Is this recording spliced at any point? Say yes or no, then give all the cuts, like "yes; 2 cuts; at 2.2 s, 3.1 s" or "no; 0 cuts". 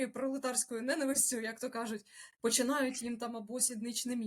no; 0 cuts